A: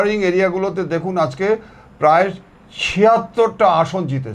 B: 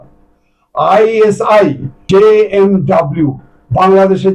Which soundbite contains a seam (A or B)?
B